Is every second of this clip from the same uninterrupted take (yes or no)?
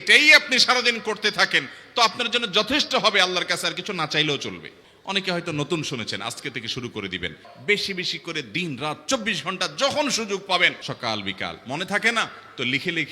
no